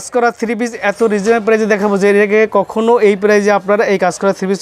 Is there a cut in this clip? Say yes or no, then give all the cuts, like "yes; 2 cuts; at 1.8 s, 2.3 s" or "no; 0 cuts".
no; 0 cuts